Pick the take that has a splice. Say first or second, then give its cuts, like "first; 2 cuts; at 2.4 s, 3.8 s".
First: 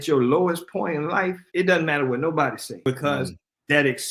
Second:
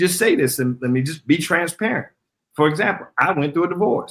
first; 2 cuts; at 1.4 s, 2.7 s